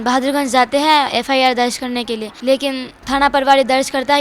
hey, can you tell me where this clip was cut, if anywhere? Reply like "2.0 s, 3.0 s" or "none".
2.3 s, 2.9 s